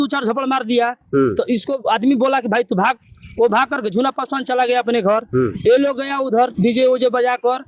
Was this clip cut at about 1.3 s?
no; 0 cuts

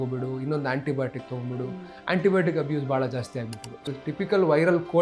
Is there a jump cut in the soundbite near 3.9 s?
yes; 1 cut; at 3.9 s

